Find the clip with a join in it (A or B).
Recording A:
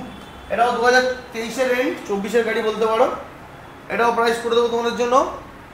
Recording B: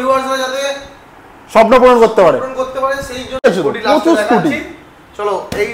B